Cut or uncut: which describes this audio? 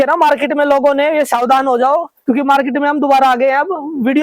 uncut